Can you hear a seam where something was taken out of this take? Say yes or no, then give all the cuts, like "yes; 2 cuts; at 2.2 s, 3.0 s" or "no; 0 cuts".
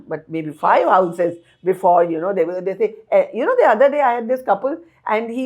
no; 0 cuts